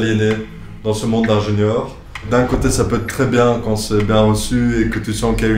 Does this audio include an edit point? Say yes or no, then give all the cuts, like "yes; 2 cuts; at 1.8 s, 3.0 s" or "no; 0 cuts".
yes; 1 cut; at 2.2 s